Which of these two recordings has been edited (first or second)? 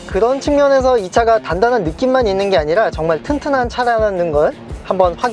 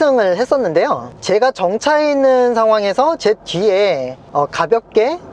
second